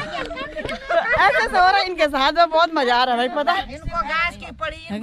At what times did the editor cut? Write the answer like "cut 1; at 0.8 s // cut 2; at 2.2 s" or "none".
cut 1; at 3.7 s